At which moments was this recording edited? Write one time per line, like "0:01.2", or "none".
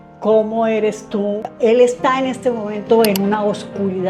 0:01.5